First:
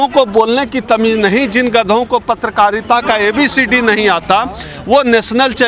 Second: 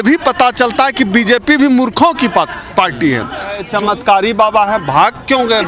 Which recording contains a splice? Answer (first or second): second